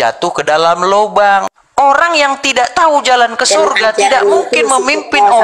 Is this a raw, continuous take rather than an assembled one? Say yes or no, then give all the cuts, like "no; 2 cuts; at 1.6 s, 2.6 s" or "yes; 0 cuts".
no; 1 cut; at 1.6 s